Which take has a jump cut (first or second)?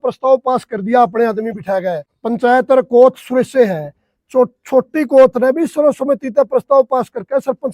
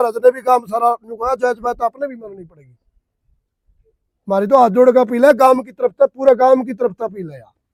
first